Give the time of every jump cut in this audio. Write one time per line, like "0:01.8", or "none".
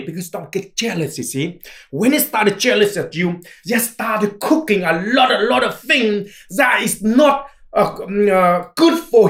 none